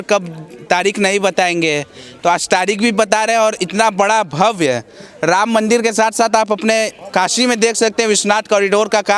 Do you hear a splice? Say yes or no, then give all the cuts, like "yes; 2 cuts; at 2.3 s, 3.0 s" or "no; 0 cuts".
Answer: no; 0 cuts